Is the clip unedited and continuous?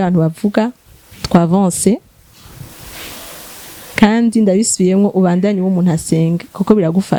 yes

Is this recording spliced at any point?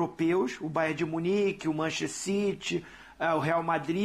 no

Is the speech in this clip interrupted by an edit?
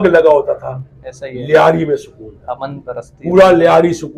no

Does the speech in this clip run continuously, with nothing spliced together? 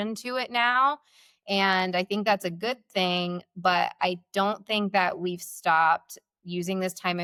yes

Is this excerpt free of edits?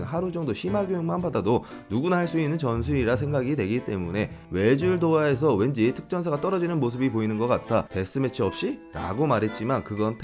no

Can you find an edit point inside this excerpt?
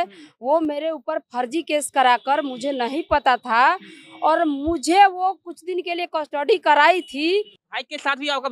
yes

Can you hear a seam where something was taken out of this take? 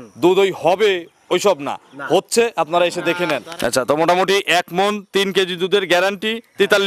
yes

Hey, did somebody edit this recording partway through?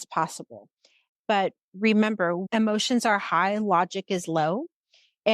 yes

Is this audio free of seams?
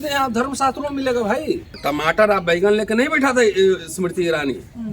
no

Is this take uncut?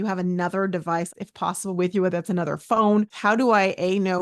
no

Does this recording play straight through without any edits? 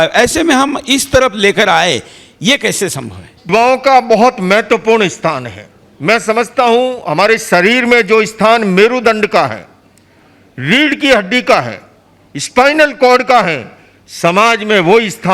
no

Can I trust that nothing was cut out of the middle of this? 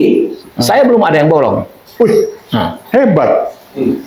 yes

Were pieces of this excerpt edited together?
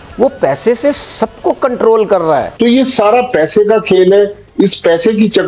yes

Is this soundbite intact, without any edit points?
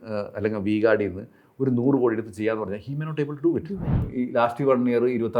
no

